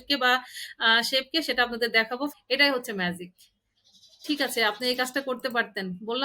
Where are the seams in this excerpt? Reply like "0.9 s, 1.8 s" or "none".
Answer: 2.3 s